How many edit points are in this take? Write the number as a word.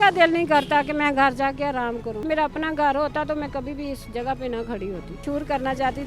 two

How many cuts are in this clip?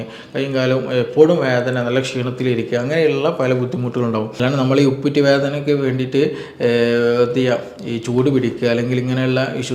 one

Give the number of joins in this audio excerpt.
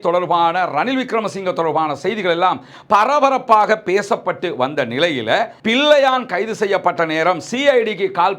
one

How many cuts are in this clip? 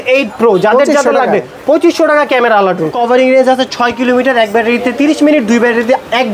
one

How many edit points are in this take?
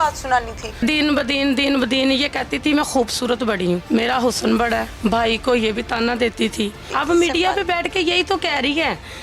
four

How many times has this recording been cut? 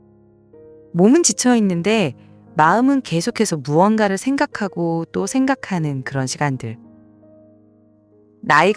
one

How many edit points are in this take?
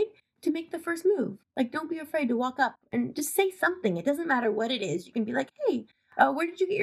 zero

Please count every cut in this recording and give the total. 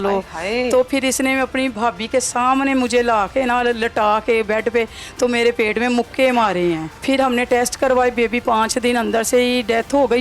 two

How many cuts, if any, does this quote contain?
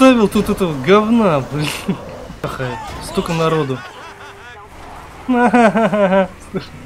one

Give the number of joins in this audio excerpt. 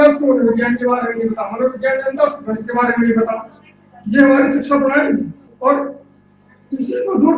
one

